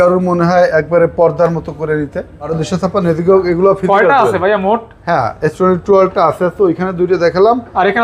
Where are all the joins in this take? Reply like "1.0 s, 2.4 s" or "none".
2.5 s